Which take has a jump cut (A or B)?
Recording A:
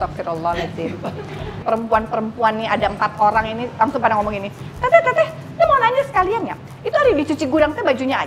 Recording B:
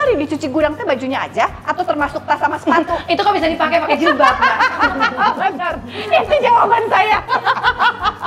A